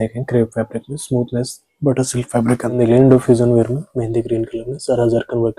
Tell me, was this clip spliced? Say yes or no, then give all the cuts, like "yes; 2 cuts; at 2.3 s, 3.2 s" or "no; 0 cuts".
yes; 1 cut; at 2.7 s